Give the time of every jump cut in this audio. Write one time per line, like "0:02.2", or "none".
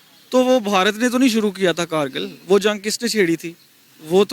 none